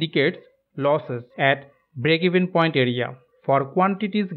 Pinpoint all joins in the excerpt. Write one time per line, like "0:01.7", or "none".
none